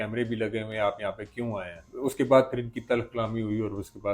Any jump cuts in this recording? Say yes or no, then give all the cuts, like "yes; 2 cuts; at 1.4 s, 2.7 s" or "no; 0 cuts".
yes; 1 cut; at 1.9 s